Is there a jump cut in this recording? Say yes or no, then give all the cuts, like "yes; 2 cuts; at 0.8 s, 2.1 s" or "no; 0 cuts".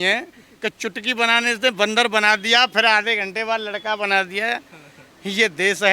no; 0 cuts